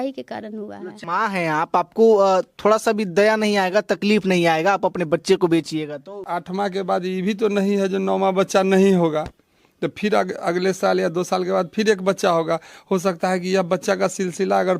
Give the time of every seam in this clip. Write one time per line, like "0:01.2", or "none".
0:01.0
0:06.2